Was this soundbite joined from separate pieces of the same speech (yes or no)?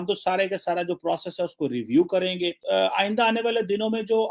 yes